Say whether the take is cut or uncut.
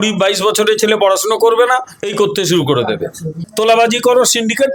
uncut